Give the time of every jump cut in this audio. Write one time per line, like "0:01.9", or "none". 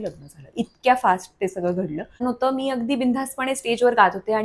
0:02.2